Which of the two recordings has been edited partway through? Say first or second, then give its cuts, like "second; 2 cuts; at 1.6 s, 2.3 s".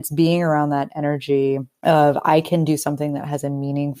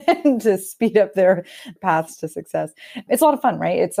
first; 1 cut; at 1.7 s